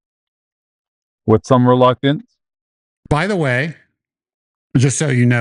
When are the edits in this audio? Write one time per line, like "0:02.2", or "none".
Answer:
none